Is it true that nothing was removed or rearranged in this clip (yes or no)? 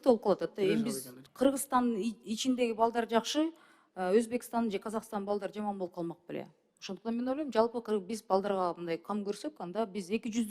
no